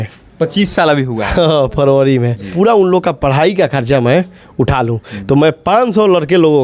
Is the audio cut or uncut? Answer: cut